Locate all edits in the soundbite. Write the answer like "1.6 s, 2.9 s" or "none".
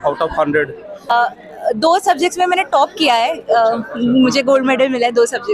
1.1 s